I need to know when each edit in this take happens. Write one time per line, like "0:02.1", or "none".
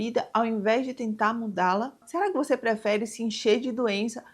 none